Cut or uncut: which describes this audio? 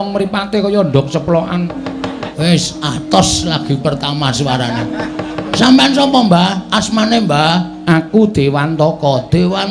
cut